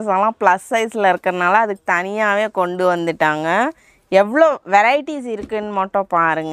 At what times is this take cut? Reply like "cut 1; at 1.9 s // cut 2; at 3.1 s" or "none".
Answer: none